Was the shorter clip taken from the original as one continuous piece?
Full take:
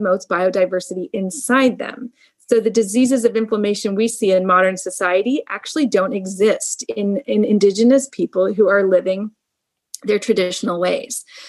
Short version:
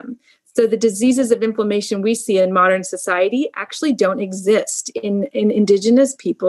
yes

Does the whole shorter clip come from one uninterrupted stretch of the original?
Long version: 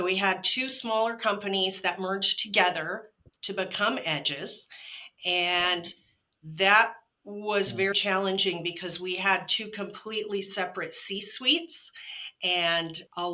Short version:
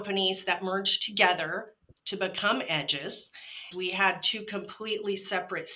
no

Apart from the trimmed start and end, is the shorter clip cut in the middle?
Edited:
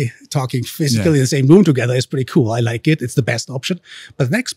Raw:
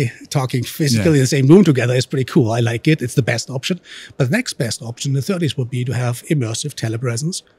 no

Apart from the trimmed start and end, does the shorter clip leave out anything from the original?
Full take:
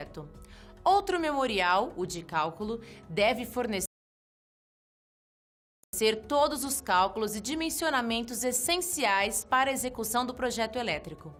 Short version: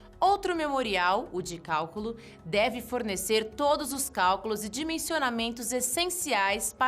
yes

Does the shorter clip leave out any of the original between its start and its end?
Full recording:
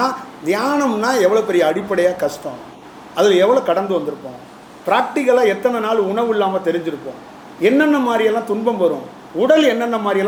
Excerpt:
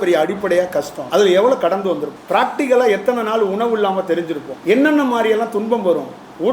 yes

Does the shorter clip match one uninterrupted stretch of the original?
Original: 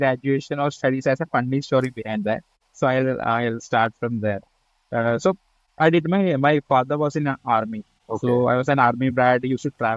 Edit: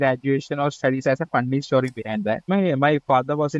no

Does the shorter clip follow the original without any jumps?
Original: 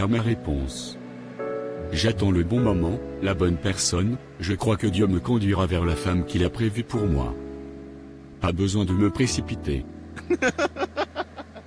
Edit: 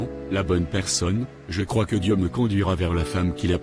yes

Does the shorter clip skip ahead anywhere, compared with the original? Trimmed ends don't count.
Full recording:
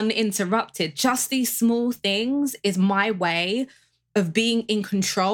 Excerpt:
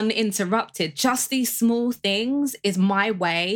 no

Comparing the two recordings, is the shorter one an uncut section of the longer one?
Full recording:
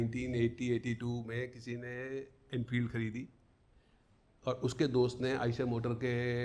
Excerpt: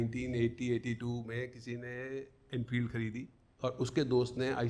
no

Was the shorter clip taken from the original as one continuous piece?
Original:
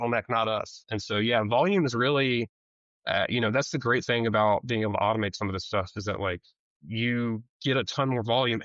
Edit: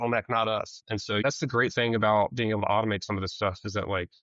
no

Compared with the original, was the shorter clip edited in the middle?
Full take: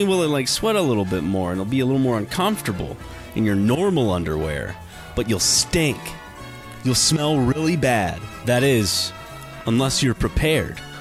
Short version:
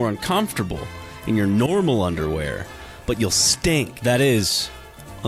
yes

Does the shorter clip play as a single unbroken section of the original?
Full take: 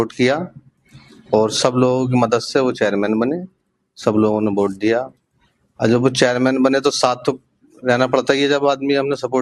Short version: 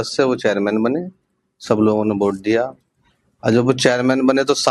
yes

